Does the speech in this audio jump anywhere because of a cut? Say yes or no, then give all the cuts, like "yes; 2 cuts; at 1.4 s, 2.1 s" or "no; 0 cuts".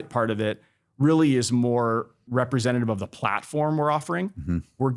yes; 1 cut; at 2.2 s